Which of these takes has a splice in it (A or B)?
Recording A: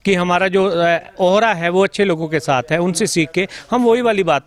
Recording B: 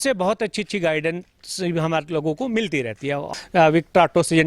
B